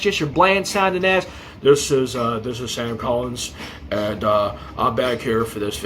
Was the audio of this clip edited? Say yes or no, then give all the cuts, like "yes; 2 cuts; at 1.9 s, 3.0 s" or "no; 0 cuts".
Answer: no; 0 cuts